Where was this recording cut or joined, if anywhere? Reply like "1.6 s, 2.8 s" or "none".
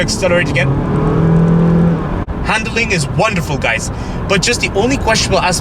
2.2 s